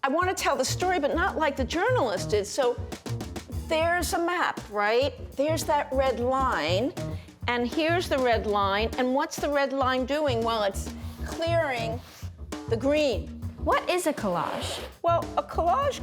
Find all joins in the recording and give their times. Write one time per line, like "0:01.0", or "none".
0:13.5